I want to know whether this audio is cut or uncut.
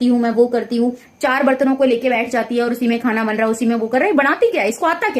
cut